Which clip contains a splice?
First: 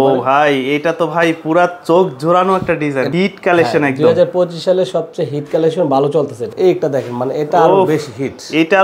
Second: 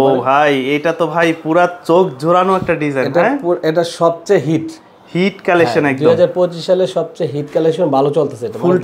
first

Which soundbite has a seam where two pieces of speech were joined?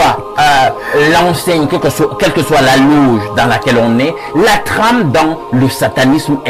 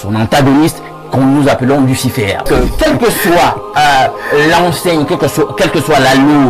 second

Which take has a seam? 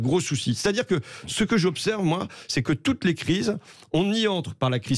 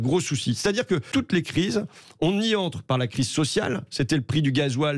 second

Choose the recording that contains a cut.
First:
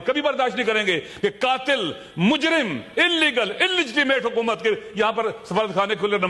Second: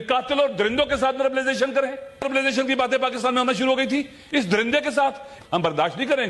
second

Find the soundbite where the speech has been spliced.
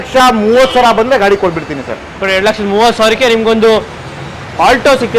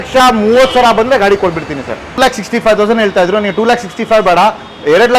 second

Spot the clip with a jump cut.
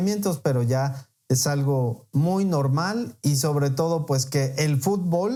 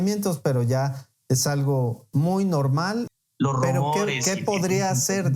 second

